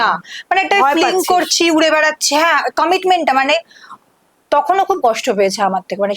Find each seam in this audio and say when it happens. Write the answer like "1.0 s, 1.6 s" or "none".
none